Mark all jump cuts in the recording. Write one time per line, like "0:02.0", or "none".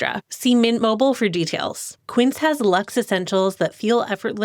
0:01.9